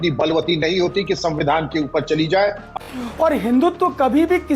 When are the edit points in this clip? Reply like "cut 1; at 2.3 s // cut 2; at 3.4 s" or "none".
cut 1; at 2.6 s